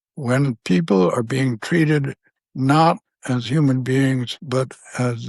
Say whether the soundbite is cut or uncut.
cut